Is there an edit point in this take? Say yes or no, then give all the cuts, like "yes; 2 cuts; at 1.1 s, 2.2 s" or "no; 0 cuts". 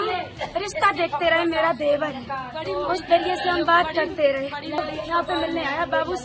yes; 1 cut; at 4.8 s